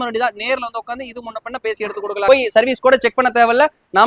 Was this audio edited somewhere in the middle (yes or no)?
yes